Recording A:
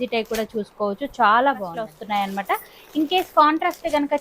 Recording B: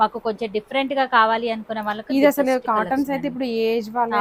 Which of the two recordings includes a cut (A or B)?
A